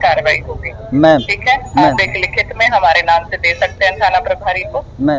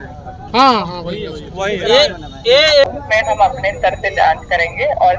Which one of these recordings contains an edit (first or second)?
second